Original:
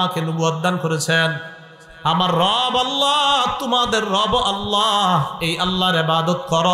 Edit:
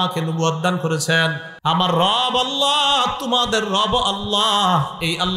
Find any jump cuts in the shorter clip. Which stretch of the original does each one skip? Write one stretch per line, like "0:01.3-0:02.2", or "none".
0:01.5-0:01.9